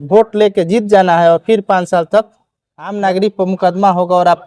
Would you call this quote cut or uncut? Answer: cut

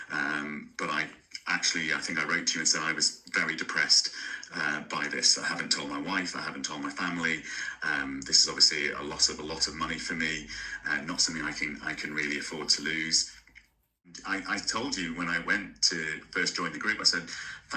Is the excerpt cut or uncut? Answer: cut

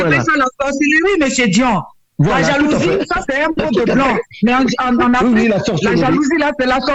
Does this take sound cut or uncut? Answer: uncut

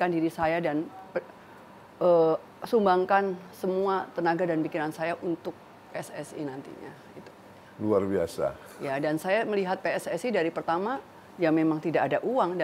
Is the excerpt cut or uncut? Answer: uncut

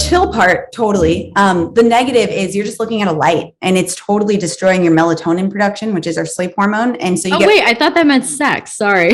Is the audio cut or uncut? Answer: uncut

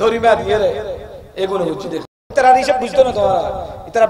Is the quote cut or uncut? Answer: cut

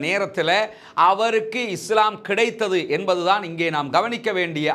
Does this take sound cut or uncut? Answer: uncut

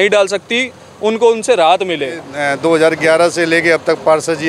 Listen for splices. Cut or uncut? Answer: cut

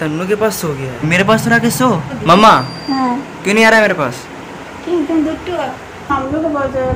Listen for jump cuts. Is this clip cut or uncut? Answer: cut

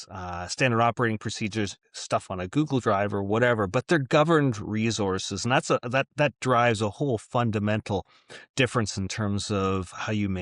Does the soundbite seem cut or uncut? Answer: uncut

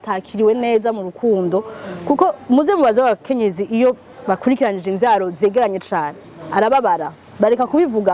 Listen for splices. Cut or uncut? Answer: uncut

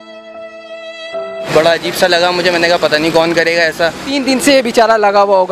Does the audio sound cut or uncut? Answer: cut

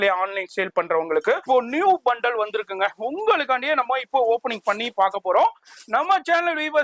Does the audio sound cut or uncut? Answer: cut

